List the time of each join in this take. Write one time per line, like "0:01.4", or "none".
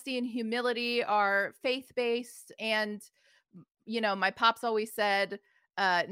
0:02.5